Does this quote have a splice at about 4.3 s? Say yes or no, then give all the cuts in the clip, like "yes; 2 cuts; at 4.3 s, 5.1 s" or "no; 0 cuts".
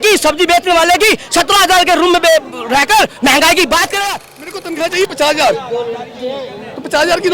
yes; 1 cut; at 4.3 s